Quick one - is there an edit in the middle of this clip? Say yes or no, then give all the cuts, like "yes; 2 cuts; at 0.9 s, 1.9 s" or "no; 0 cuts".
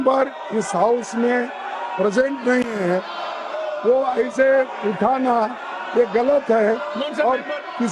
no; 0 cuts